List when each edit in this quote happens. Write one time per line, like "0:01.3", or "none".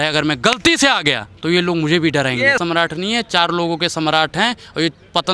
0:01.3
0:02.6